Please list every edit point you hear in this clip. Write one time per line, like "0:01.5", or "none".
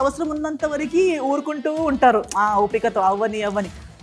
none